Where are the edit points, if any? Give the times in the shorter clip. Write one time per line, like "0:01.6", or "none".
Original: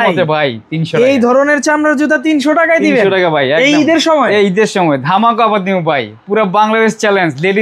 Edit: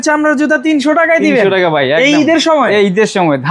none